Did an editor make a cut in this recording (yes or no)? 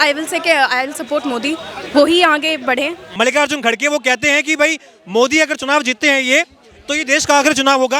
yes